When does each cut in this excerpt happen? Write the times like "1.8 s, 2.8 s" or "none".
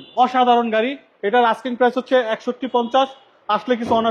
none